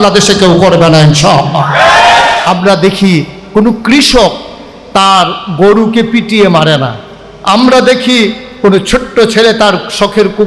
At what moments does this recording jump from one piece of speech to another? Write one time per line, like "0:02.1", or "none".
0:02.4